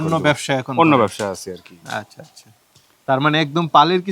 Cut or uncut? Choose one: uncut